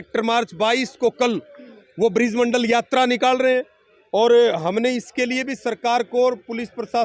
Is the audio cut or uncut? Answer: uncut